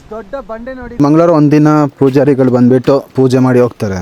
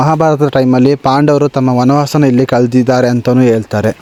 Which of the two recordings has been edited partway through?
first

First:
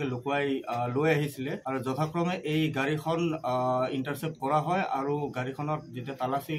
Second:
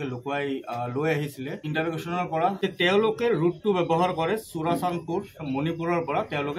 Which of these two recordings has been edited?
second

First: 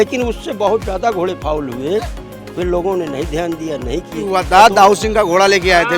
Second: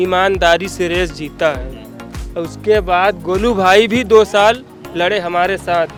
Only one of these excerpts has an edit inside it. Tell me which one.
first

